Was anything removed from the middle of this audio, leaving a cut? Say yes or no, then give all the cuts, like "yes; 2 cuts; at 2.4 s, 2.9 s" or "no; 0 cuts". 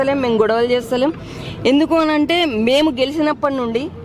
no; 0 cuts